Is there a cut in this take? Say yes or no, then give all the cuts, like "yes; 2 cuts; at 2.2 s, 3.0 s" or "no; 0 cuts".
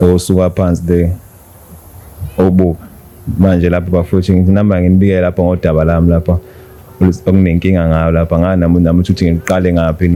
no; 0 cuts